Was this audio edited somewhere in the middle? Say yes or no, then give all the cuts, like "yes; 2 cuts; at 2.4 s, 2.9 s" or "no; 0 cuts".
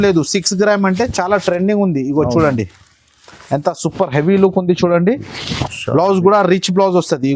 no; 0 cuts